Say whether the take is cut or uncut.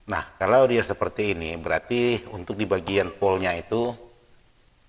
uncut